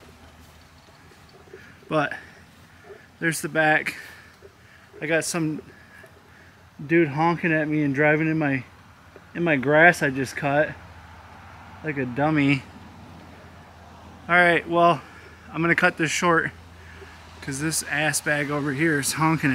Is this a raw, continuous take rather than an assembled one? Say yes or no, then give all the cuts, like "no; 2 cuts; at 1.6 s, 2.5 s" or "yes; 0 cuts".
yes; 0 cuts